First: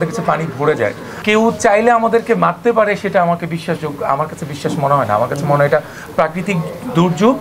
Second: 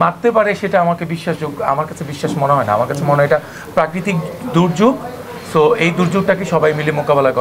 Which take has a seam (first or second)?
first